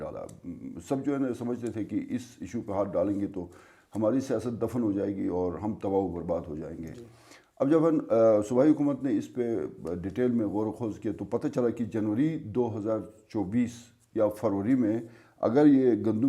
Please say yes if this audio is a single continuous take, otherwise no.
yes